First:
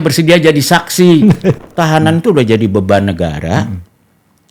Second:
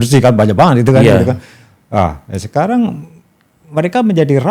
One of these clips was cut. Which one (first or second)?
first